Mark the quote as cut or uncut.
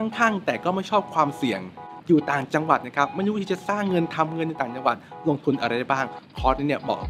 uncut